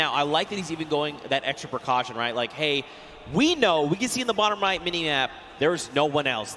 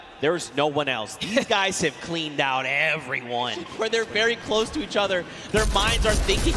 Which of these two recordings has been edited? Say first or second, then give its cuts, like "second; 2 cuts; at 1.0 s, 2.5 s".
second; 1 cut; at 3.6 s